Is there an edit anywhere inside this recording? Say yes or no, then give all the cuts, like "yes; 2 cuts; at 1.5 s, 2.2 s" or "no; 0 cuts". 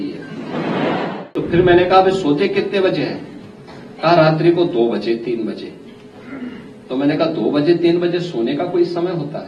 yes; 1 cut; at 1.3 s